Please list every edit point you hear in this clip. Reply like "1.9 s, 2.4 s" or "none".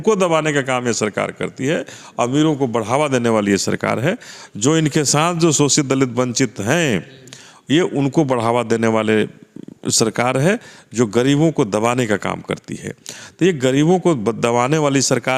none